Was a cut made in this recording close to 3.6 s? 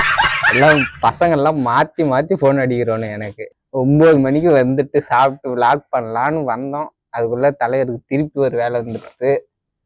yes; 1 cut; at 3.6 s

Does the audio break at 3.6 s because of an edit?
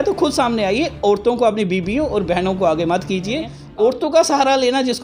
yes; 1 cut; at 3.6 s

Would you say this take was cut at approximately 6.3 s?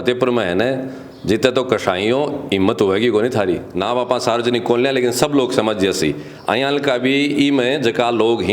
no; 1 cut; at 3.7 s

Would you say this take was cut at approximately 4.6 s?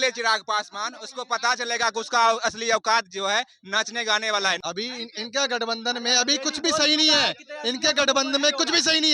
yes; 1 cut; at 4.6 s

